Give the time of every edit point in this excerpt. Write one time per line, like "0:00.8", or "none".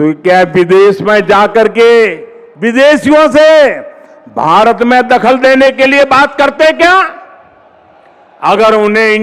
none